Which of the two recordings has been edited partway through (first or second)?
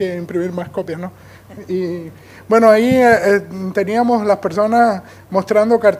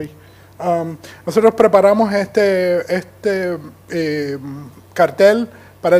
second